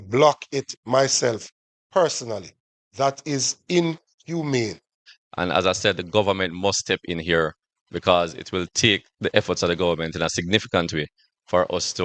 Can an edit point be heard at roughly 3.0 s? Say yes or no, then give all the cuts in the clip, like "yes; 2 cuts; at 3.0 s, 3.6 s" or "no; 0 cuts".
no; 1 cut; at 5.1 s